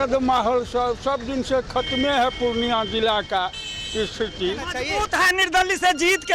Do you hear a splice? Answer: yes; 1 cut; at 4.8 s

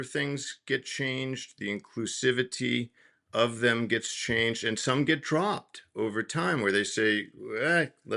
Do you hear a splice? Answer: no; 0 cuts

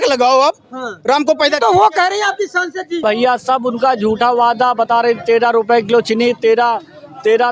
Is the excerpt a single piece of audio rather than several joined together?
no; 1 cut; at 3.0 s

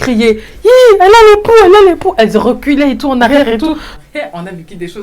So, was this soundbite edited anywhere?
yes; 1 cut; at 4.0 s

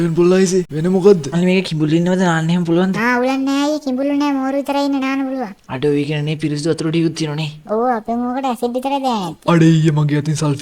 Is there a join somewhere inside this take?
yes; 1 cut; at 1.3 s

